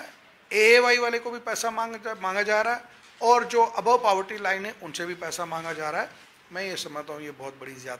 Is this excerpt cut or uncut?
uncut